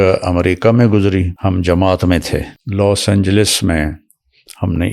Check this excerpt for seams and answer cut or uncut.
cut